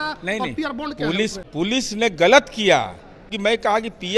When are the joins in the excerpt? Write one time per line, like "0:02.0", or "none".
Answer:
0:01.4
0:03.3